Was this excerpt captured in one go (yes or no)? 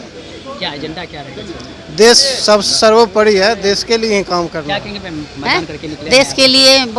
yes